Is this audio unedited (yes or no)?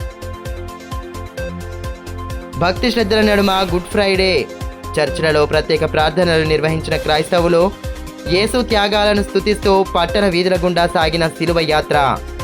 yes